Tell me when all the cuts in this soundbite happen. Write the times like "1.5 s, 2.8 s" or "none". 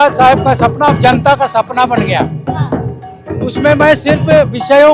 none

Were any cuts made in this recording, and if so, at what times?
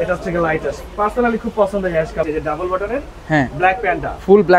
2.2 s

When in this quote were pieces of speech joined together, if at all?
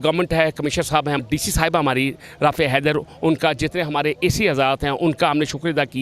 1.2 s

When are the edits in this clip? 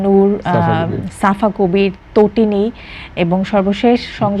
none

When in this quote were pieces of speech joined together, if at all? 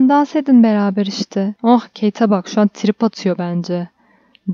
1.5 s

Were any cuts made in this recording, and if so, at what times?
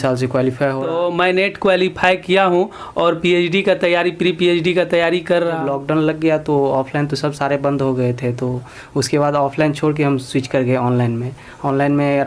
0.9 s, 5.6 s

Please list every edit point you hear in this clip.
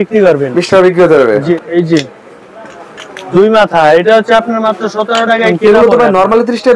1.5 s, 5.5 s

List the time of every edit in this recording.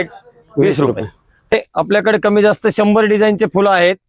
1.5 s

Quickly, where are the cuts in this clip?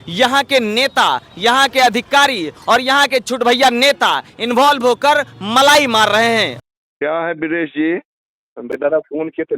6.6 s, 8.7 s

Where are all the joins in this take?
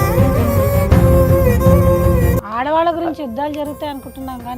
2.4 s

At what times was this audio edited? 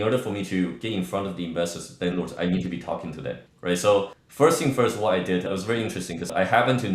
none

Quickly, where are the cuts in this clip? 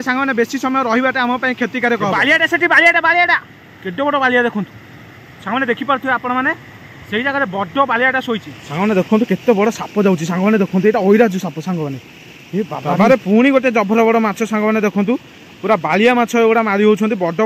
2.2 s, 8.6 s, 12.9 s

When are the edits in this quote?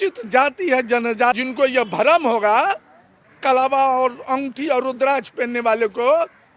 1.4 s

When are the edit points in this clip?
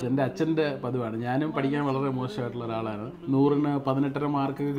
none

